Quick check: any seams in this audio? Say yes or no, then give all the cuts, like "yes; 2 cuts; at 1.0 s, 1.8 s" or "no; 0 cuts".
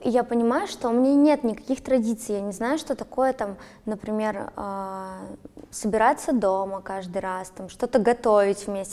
no; 0 cuts